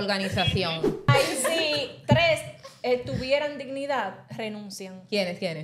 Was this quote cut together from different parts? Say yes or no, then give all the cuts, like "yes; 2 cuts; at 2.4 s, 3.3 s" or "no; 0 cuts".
yes; 1 cut; at 1.1 s